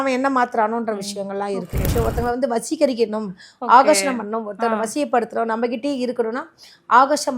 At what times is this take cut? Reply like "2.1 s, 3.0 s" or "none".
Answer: 1.9 s